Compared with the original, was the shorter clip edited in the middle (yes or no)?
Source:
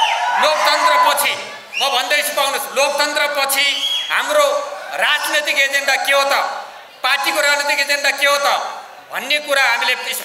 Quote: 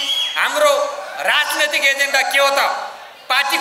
no